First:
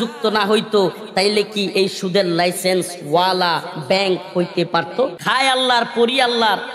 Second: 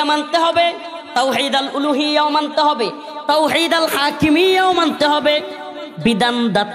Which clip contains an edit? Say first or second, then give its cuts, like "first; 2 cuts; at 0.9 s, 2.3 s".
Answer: first; 1 cut; at 5.2 s